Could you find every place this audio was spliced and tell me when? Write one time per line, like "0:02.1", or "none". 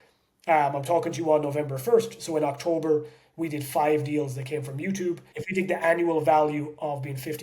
0:05.3

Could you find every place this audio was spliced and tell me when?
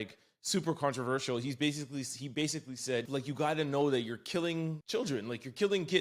0:03.1
0:04.8

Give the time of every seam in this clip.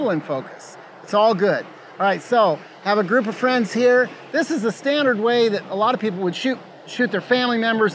none

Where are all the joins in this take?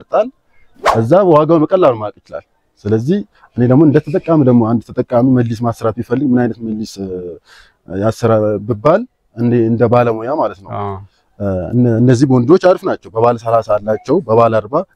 none

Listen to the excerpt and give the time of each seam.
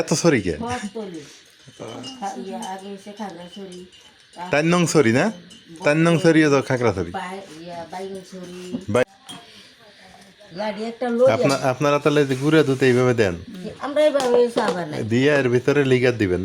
0:09.0

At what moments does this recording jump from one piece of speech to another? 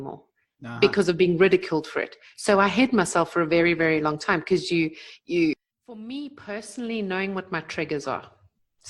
0:05.6

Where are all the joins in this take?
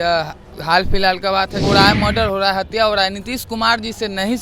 0:01.6

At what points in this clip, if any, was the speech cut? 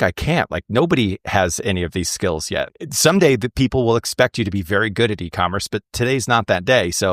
0:02.7

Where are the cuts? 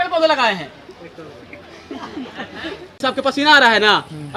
0:03.0

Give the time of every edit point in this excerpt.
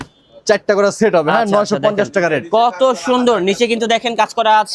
none

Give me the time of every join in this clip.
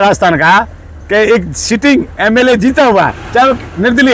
none

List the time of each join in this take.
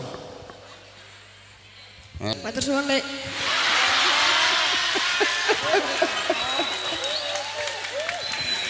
0:02.3

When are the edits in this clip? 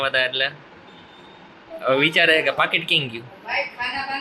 none

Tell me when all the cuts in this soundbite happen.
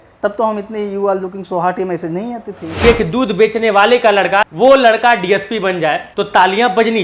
0:02.8
0:04.4
0:06.1

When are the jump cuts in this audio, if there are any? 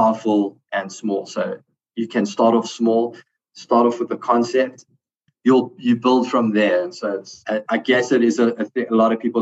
0:04.8
0:07.3

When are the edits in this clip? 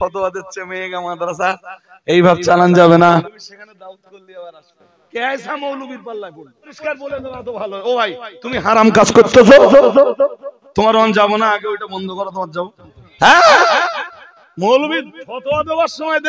0:03.2
0:05.1
0:06.7
0:13.0

